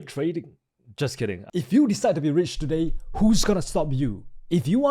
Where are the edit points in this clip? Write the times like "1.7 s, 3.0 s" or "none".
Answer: 1.4 s